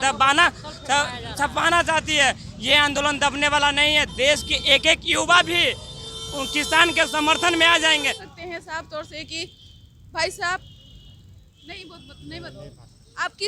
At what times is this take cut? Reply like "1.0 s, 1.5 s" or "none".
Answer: 8.2 s